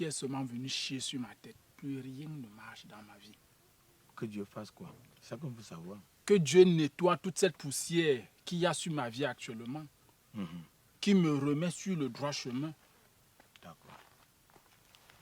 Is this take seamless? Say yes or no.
no